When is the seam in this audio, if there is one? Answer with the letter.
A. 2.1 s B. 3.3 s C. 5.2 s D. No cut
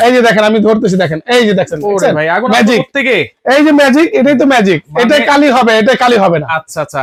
D